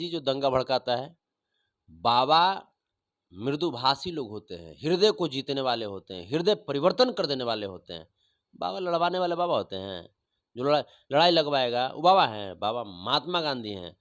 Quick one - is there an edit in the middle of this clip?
no; 0 cuts

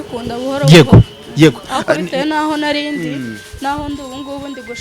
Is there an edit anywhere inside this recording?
no; 0 cuts

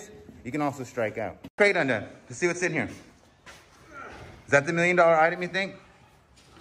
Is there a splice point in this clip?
yes; 1 cut; at 1.5 s

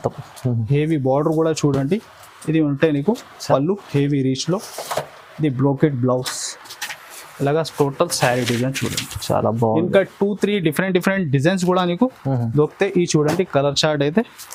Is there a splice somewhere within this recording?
no; 0 cuts

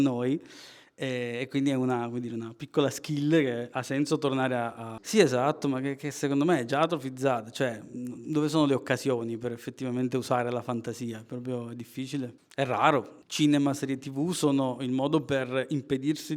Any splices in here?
yes; 3 cuts; at 4.9 s, 12.4 s, 13.2 s

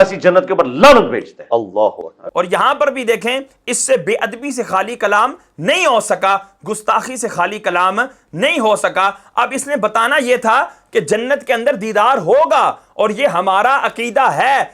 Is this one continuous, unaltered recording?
yes; 0 cuts

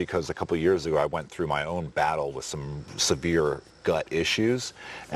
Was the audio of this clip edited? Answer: no; 0 cuts

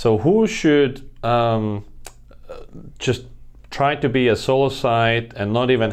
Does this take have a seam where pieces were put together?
no; 0 cuts

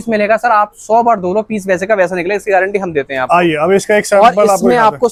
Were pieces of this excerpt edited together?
no; 0 cuts

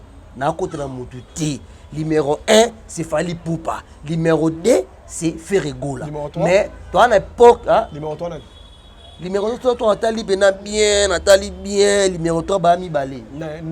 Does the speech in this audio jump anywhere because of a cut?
no; 0 cuts

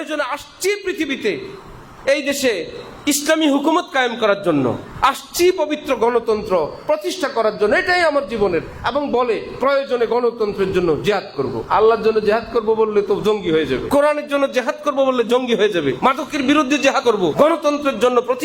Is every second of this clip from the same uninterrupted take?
no; 4 cuts; at 11.6 s, 13.8 s, 16.0 s, 17.1 s

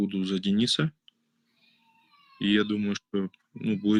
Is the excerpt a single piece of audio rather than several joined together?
yes; 0 cuts

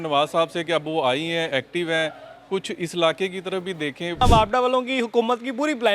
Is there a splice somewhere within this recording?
yes; 1 cut; at 4.2 s

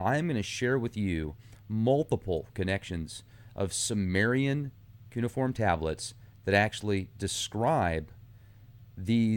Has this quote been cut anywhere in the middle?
no; 0 cuts

